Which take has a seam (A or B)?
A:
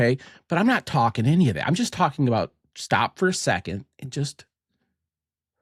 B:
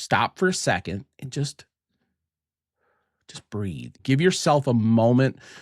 B